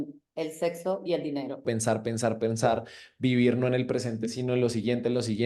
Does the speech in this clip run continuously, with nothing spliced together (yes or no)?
no